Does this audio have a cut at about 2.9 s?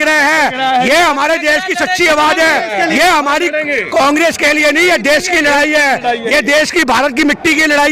no; 0 cuts

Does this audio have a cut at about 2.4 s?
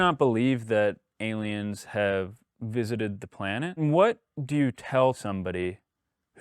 no; 2 cuts; at 3.8 s, 5.2 s

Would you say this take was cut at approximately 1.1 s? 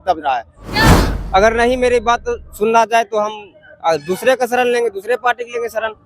yes; 1 cut; at 1.1 s

